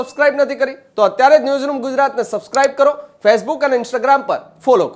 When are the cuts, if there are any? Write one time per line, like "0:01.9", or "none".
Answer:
none